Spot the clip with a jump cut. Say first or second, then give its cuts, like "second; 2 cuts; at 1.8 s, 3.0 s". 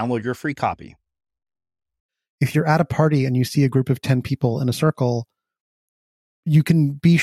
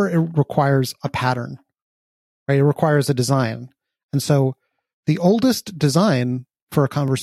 first; 2 cuts; at 2.2 s, 6.3 s